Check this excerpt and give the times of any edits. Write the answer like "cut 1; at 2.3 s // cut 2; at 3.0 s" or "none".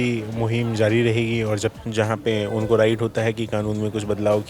cut 1; at 1.8 s